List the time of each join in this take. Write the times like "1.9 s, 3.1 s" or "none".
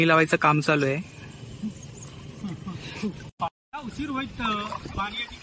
3.2 s